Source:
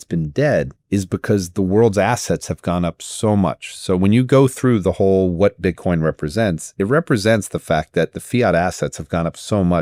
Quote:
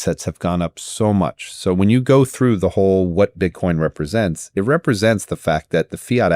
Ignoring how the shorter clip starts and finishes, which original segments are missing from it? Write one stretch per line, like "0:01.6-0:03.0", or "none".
none